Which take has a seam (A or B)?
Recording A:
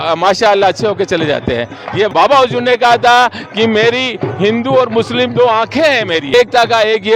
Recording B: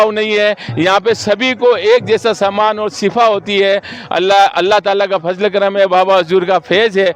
A